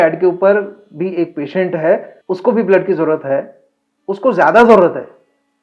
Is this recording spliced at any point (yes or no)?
yes